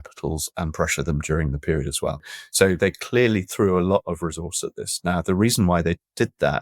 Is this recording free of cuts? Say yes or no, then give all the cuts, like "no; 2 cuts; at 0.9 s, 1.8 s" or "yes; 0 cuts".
no; 1 cut; at 2.3 s